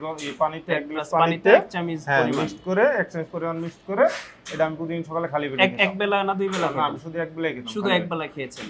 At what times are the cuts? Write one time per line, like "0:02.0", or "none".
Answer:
none